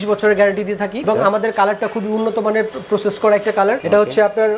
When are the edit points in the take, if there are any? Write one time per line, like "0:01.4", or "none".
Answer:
none